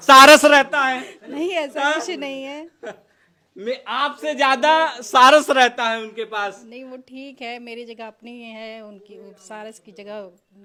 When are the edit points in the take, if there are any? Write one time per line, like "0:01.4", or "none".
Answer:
none